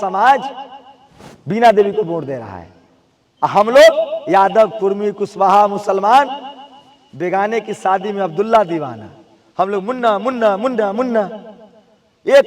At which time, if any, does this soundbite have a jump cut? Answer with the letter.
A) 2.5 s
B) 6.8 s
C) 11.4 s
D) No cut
D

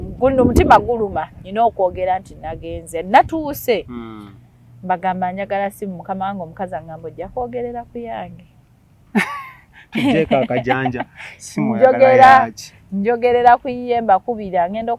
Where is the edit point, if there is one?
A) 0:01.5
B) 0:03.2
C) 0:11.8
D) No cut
D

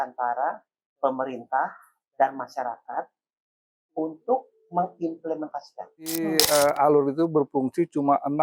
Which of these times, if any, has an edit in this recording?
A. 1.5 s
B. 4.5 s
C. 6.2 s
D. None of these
C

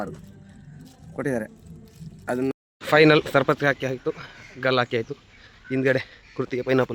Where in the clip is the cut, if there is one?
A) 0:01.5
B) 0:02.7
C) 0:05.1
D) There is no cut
B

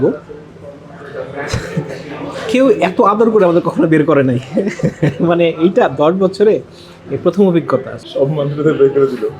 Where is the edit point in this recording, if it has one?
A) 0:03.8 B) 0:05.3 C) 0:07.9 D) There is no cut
C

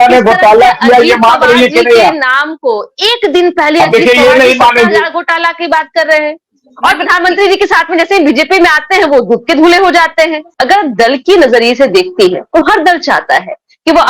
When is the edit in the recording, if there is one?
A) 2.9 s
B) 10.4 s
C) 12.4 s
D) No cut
B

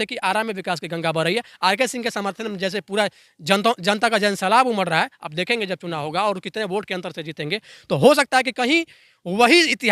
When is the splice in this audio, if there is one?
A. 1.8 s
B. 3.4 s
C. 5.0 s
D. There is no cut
D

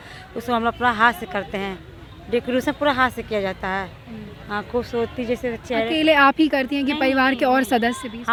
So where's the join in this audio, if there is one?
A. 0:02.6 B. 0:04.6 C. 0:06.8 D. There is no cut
D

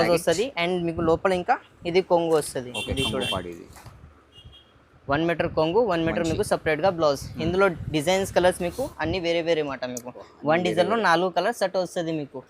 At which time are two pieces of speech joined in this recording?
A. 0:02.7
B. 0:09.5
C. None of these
C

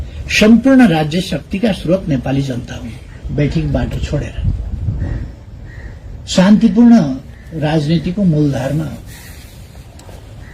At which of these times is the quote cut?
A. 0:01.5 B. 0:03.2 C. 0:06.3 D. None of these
B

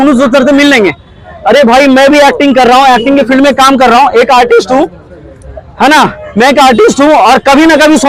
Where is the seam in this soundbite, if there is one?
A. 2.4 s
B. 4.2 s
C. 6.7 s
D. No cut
D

